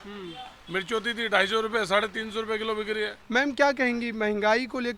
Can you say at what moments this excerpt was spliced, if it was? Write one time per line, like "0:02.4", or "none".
0:03.2